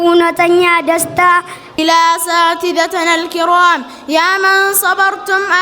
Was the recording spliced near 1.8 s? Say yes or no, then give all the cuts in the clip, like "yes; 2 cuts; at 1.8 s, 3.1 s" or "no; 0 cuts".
yes; 1 cut; at 1.8 s